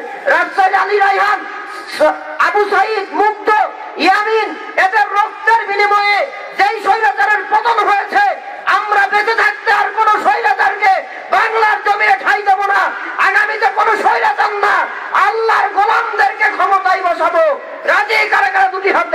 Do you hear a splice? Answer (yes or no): no